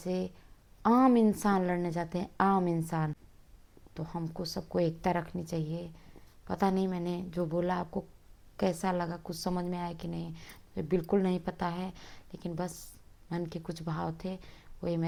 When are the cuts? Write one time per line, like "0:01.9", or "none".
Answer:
none